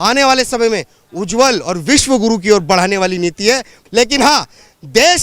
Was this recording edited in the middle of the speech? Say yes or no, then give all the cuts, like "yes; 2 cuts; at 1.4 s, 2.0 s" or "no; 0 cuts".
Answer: yes; 1 cut; at 3.8 s